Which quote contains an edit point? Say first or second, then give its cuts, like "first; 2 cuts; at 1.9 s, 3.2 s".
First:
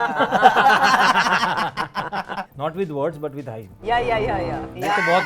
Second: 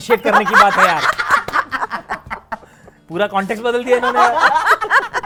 first; 1 cut; at 2.5 s